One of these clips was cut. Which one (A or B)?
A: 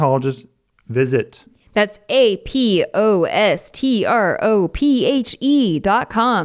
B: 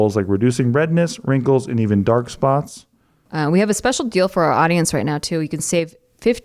B